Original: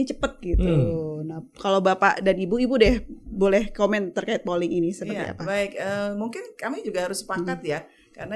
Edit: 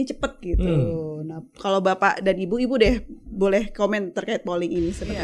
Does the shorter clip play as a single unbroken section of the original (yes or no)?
yes